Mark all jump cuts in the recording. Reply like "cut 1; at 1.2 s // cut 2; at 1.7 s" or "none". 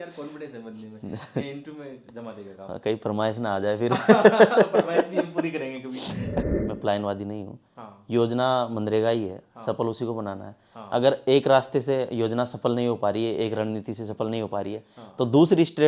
cut 1; at 6.4 s